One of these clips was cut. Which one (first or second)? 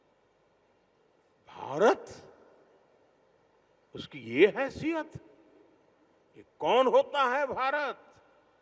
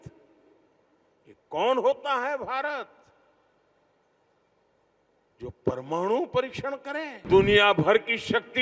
second